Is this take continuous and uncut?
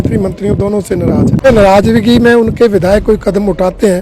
no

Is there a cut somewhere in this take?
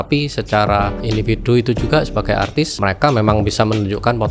yes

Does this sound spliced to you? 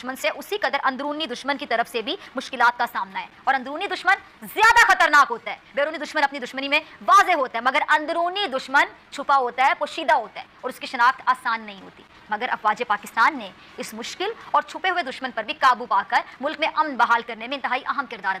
no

